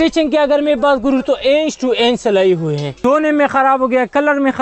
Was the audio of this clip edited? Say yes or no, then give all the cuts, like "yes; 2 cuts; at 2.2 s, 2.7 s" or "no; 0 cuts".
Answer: yes; 1 cut; at 2.9 s